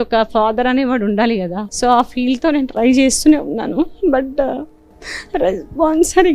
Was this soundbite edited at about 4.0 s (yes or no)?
no